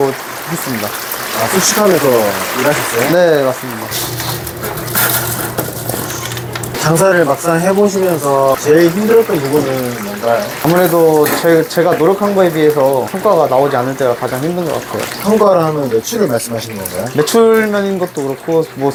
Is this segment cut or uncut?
uncut